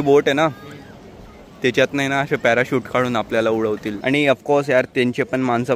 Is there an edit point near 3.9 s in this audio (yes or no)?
yes